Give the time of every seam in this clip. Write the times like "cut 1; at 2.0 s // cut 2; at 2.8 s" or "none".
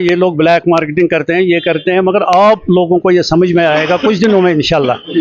none